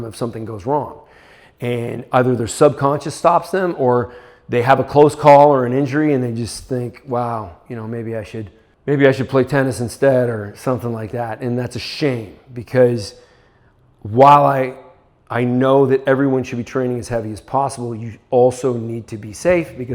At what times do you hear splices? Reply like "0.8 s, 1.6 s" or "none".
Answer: 8.6 s